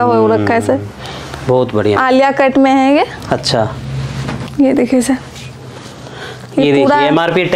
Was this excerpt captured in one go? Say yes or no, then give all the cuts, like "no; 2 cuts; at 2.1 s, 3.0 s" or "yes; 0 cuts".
yes; 0 cuts